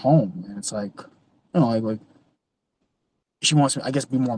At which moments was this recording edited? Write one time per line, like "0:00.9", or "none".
none